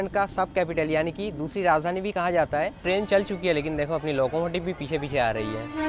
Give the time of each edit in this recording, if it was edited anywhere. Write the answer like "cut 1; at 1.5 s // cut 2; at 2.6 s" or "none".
cut 1; at 2.8 s